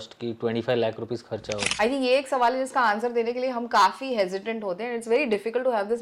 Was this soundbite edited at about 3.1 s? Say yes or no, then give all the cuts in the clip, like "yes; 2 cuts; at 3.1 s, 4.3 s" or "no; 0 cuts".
no; 1 cut; at 1.7 s